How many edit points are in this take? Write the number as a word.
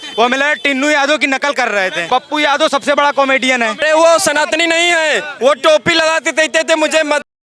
two